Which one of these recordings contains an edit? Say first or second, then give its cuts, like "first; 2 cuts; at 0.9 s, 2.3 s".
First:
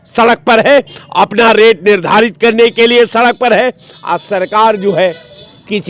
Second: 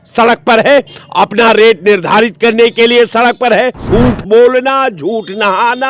second; 1 cut; at 3.8 s